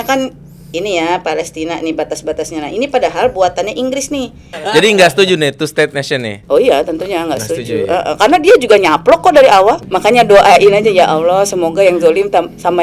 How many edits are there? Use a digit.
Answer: 2